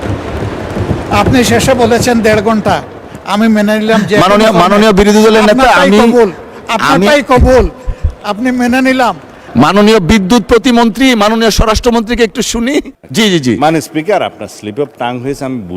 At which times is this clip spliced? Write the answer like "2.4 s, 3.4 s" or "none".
9.4 s, 13.0 s

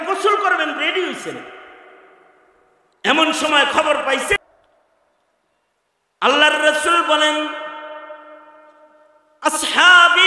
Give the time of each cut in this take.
4.4 s

